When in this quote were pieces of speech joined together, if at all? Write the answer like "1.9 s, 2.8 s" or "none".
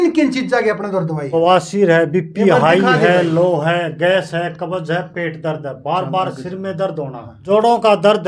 1.3 s

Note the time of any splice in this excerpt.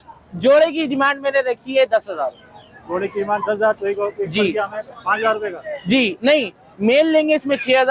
none

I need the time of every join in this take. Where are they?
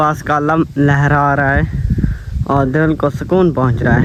none

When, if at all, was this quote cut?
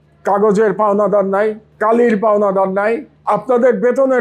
1.7 s, 3.1 s

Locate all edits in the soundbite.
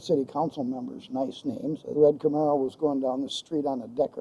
2.0 s

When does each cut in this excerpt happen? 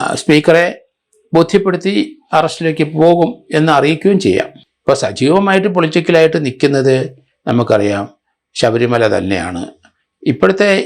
4.6 s

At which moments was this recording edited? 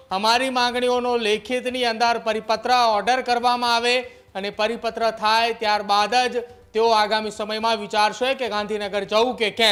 none

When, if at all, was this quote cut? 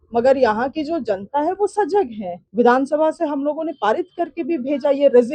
2.3 s

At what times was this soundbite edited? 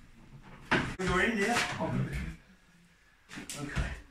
1.0 s

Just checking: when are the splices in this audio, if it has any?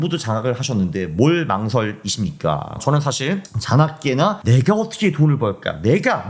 2.8 s, 4.4 s

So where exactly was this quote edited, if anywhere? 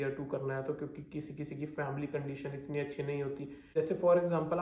3.5 s

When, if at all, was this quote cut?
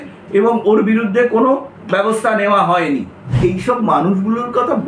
3.4 s

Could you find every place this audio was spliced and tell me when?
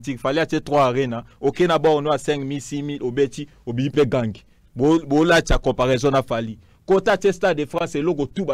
none

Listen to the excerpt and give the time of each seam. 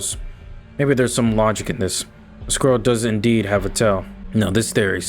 4.1 s

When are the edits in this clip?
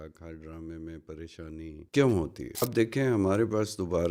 1.8 s, 2.6 s

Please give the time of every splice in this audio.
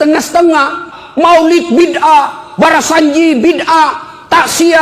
1.0 s

